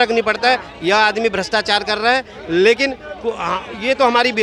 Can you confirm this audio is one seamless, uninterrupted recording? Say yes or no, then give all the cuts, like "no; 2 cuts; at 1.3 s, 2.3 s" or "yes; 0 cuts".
yes; 0 cuts